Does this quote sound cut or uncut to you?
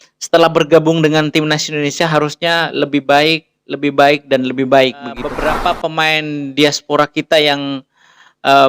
cut